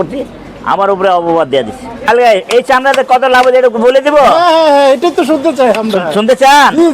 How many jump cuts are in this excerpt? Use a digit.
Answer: 1